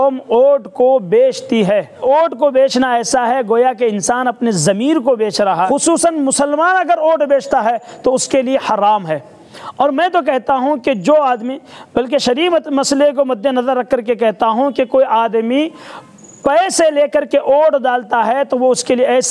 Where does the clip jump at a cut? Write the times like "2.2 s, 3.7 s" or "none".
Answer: 1.9 s, 5.7 s